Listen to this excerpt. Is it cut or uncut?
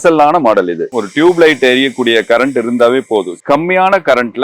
cut